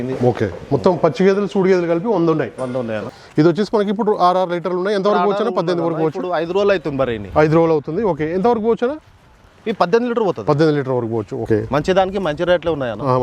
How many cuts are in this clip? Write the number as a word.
two